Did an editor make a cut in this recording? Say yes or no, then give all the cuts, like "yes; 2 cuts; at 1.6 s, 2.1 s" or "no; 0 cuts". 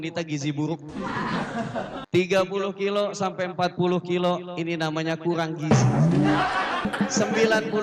yes; 2 cuts; at 2.0 s, 6.9 s